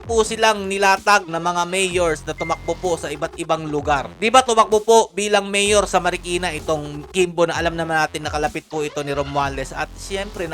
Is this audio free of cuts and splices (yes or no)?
no